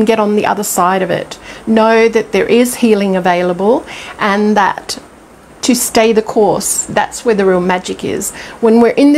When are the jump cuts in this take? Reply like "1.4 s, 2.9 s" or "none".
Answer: none